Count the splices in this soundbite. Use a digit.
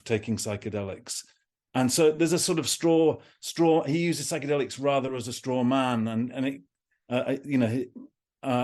0